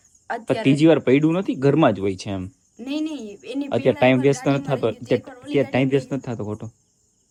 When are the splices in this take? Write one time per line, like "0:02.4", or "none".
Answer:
none

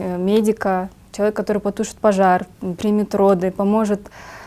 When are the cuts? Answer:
none

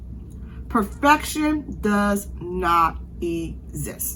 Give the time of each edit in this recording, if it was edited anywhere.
none

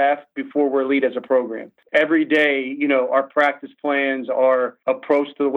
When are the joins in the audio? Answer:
0:01.8
0:04.8

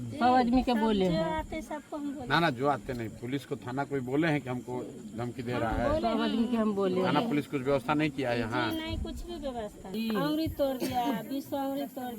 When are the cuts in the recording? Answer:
0:10.0

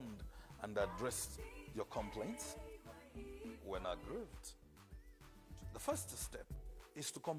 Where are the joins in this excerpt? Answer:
none

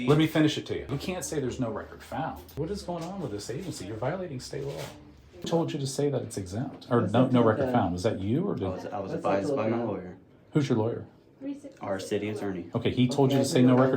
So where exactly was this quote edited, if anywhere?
0:00.9
0:02.5
0:05.5

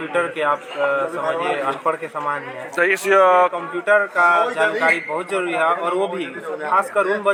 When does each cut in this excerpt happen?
none

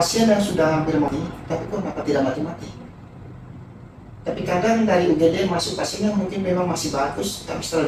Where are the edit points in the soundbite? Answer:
0:01.1

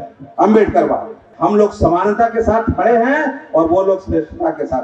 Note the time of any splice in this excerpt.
0:01.2

